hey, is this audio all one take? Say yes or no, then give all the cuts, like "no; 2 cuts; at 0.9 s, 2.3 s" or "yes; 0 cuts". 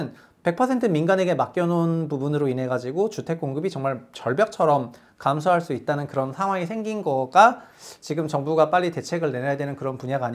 yes; 0 cuts